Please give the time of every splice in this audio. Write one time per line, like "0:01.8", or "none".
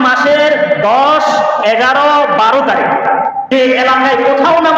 0:03.5

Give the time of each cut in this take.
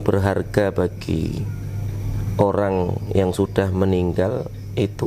none

